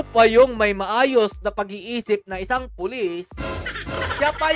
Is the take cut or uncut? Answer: uncut